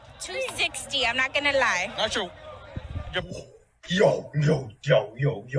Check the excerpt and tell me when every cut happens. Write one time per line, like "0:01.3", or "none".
0:01.9